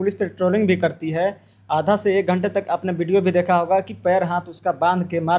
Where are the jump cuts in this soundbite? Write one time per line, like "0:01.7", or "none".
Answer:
none

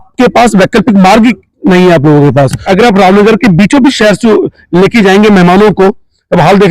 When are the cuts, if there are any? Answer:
0:02.6

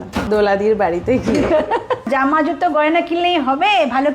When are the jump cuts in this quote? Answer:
0:02.1

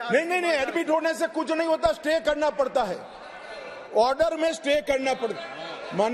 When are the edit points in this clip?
none

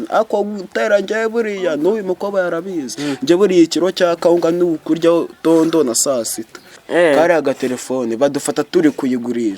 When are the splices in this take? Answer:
0:06.8

